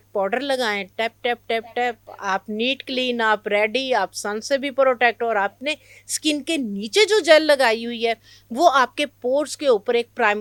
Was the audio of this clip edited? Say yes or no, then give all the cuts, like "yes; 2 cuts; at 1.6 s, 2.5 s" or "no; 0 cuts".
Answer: no; 0 cuts